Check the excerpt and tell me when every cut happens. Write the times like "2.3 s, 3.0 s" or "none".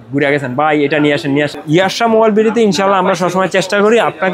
1.6 s